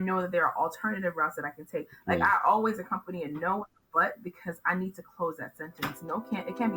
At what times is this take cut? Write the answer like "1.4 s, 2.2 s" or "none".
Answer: none